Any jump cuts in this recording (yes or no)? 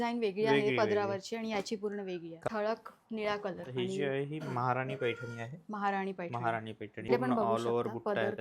yes